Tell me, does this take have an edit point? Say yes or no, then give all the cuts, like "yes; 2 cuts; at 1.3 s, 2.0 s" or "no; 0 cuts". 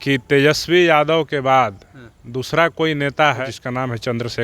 yes; 1 cut; at 3.4 s